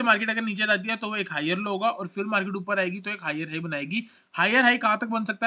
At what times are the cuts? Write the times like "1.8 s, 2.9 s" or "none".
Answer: none